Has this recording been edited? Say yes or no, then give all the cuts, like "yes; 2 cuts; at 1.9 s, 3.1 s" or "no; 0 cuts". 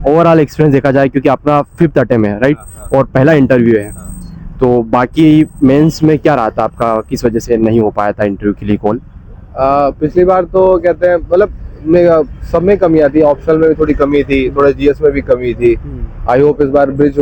no; 0 cuts